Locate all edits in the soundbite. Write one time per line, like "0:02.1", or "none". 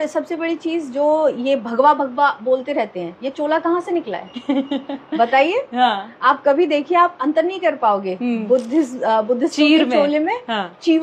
none